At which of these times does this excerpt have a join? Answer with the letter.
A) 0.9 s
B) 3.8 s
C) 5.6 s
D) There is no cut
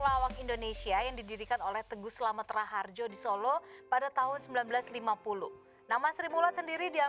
D